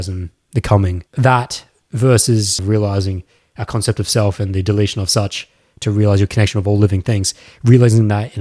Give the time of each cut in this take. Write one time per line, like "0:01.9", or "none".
0:01.0
0:02.6